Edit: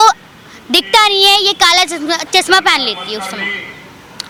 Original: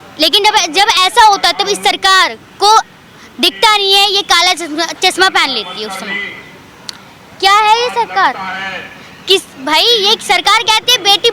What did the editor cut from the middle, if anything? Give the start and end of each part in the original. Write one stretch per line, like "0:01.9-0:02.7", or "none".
none